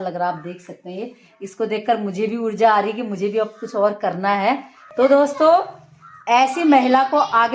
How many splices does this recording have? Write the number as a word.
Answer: one